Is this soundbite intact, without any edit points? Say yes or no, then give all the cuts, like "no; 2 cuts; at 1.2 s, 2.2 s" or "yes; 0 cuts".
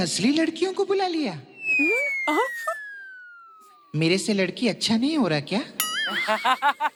yes; 0 cuts